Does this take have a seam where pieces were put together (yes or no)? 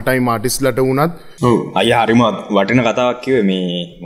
yes